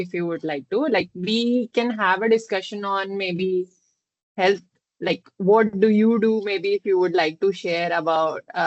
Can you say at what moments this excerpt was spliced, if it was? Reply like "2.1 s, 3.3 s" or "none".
none